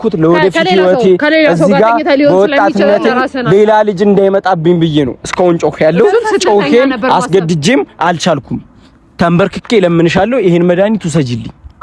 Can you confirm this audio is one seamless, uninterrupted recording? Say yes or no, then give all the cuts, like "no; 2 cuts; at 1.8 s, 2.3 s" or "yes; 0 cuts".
yes; 0 cuts